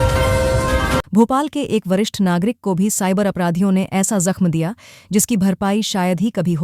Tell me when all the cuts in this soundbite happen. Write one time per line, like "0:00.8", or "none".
none

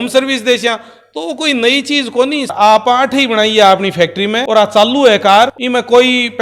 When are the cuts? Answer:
0:02.5
0:05.5

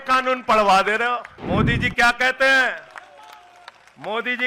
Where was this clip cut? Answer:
0:01.3

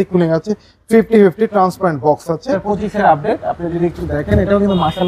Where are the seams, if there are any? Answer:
0:02.6

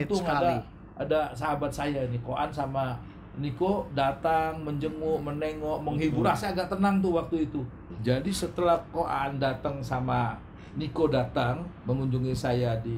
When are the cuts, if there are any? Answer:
0:07.9

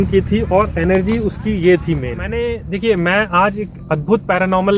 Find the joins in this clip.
0:02.3

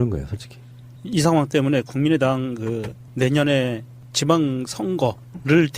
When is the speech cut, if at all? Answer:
0:04.1

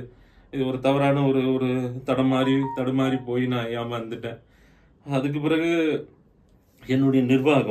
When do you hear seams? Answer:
none

